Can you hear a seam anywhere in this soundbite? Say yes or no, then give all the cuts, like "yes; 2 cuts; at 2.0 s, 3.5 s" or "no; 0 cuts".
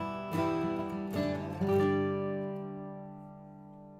no; 0 cuts